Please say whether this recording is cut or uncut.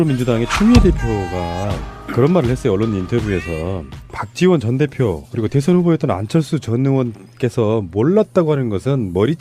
uncut